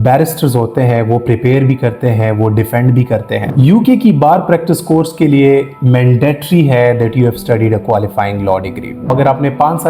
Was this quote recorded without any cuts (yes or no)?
no